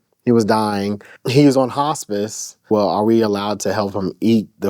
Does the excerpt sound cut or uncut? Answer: cut